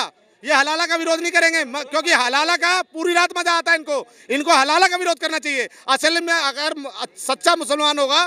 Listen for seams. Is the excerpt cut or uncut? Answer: uncut